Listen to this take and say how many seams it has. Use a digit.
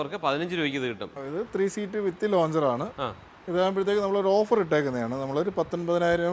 1